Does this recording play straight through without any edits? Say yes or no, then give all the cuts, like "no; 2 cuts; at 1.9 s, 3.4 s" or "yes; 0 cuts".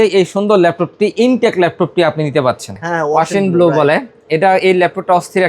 no; 1 cut; at 2.7 s